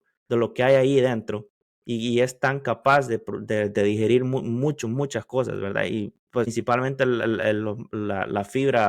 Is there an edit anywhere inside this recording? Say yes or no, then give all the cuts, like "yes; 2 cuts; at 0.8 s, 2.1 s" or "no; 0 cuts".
yes; 1 cut; at 6.5 s